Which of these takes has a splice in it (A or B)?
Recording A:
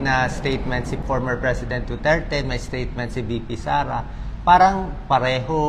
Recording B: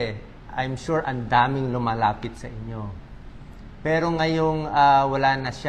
A